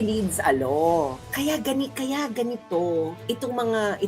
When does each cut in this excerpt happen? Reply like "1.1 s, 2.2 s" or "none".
1.2 s